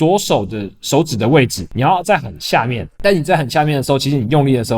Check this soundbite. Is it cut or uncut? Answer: cut